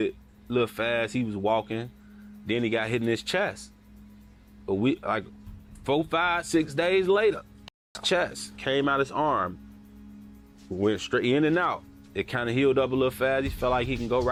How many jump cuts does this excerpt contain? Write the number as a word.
zero